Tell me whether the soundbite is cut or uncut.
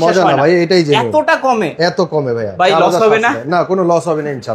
uncut